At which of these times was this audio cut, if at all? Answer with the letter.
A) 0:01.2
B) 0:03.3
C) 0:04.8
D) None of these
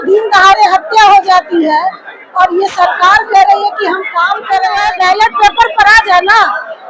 C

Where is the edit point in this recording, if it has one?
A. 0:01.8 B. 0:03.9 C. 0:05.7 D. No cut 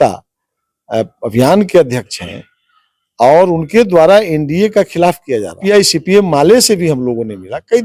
C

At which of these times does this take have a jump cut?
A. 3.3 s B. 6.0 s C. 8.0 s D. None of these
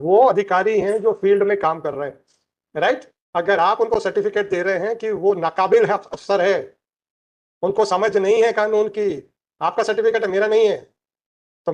D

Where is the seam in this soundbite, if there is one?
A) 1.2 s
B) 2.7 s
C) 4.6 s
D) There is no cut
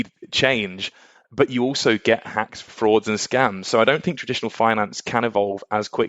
B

